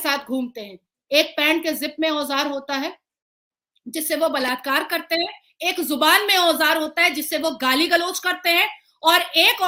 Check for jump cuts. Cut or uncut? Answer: uncut